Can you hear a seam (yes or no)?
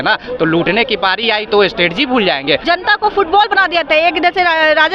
yes